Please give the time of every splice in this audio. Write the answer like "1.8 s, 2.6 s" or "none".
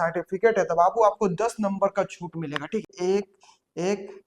2.9 s